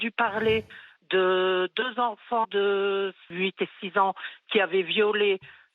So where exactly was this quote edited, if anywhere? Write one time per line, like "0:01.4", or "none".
0:03.3